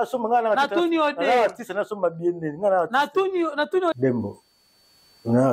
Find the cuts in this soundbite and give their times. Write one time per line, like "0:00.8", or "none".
0:04.0